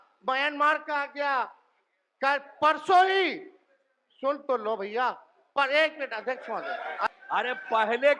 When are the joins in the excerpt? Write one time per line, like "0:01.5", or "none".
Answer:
0:07.1